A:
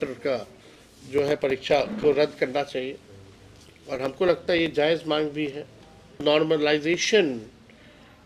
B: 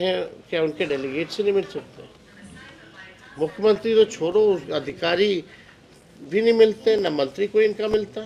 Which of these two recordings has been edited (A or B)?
A